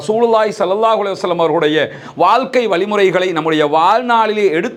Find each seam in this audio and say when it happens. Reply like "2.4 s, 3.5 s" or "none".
none